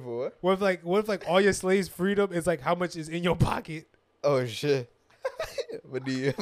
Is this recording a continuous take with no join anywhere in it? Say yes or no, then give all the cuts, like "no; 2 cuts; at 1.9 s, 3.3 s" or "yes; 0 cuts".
yes; 0 cuts